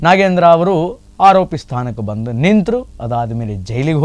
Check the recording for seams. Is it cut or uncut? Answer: uncut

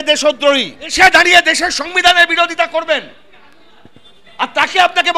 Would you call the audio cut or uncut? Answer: cut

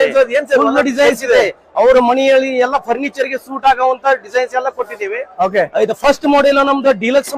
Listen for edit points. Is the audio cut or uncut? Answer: uncut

